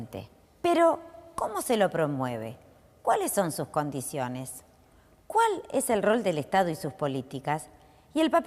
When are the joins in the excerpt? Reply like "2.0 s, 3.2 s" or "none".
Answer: none